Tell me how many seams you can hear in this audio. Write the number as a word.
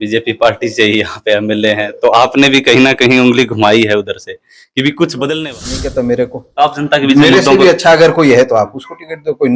one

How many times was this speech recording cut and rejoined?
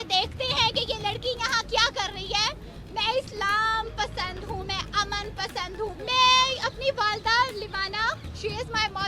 two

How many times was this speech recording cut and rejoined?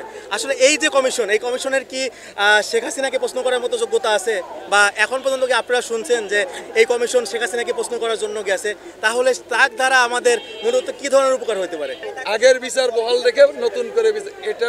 zero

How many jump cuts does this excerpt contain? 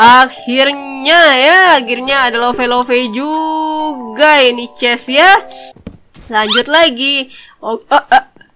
one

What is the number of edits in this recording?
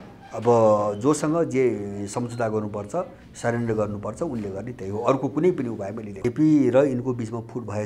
one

